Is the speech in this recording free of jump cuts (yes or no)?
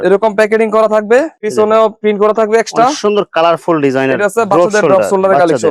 yes